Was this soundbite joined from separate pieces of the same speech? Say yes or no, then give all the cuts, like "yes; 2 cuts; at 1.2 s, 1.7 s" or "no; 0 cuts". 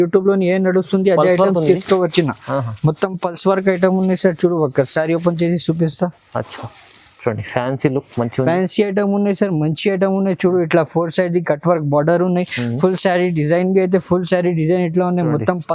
no; 0 cuts